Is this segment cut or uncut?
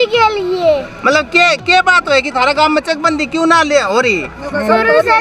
uncut